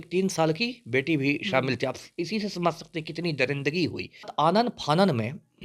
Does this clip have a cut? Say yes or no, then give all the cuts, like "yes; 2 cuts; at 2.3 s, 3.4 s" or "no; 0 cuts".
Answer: yes; 1 cut; at 4.3 s